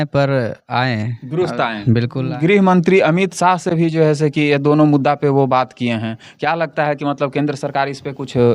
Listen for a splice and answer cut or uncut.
cut